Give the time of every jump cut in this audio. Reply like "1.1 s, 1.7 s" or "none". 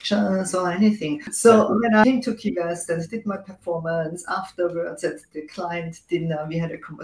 1.3 s, 2.0 s